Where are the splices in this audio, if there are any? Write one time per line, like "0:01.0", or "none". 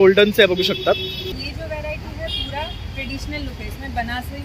0:01.2